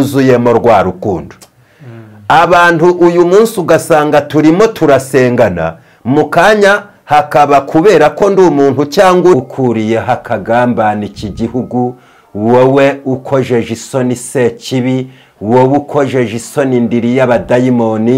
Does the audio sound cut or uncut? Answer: cut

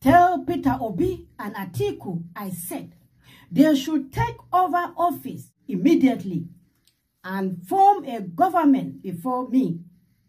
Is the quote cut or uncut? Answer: cut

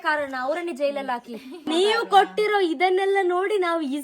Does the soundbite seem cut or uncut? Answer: cut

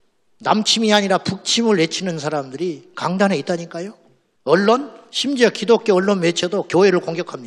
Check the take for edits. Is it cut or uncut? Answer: uncut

